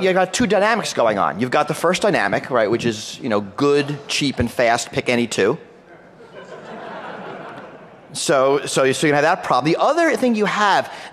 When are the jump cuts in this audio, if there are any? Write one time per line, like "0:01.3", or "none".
0:05.5